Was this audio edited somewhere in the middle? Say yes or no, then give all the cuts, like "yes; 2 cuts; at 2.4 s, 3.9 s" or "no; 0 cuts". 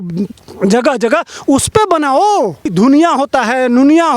yes; 1 cut; at 2.7 s